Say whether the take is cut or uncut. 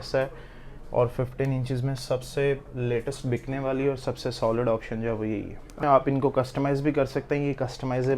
cut